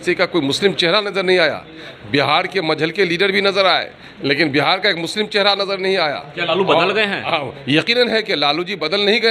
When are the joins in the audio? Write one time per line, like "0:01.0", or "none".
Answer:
none